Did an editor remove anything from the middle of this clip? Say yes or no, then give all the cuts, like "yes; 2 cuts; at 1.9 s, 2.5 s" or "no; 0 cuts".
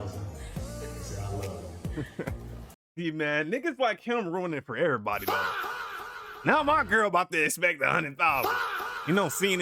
no; 0 cuts